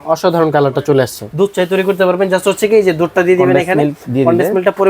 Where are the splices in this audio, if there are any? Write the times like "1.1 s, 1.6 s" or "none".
1.2 s